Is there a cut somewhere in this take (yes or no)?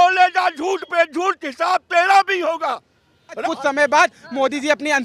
yes